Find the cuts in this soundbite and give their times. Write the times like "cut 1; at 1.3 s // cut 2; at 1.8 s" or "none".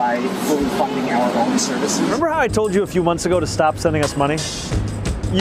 cut 1; at 2.1 s